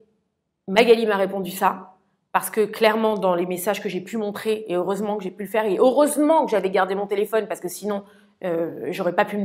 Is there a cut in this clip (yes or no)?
no